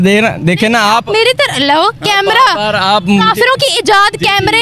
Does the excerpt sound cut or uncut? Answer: uncut